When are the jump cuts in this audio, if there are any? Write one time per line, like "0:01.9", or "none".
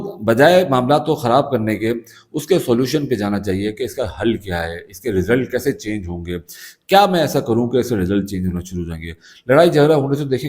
none